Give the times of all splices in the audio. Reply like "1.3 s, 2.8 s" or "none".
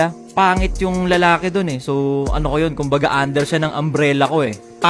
none